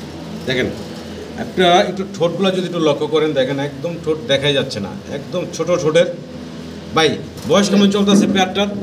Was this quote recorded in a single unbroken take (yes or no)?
yes